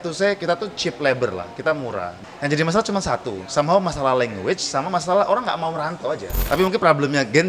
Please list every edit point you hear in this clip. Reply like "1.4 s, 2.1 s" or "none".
2.2 s, 6.4 s